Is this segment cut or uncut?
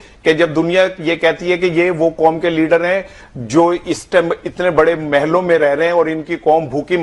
uncut